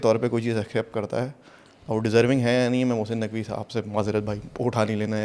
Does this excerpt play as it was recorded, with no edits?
yes; 0 cuts

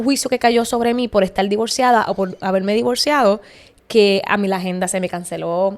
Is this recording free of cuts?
yes; 0 cuts

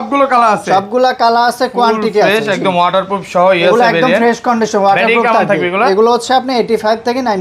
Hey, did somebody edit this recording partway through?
no; 0 cuts

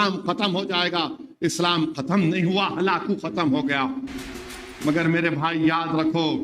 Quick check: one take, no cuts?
no; 1 cut; at 4.7 s

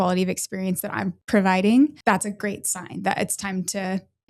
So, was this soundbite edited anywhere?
yes; 2 cuts; at 1.2 s, 2.0 s

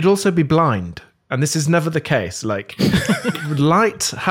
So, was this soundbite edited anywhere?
no; 0 cuts

